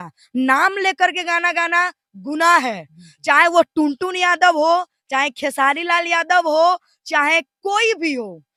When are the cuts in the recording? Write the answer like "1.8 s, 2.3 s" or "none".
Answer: none